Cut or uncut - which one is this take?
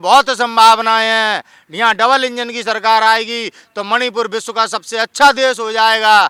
uncut